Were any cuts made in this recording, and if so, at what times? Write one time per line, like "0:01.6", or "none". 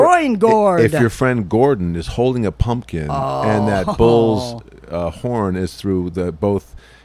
none